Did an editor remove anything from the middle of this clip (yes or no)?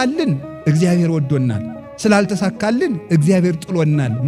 no